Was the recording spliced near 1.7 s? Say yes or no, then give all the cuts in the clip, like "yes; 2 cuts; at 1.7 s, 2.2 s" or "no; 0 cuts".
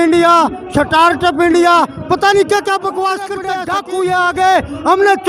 no; 1 cut; at 3.4 s